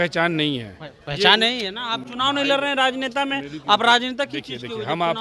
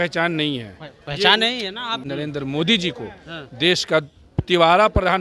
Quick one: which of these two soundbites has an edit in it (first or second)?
second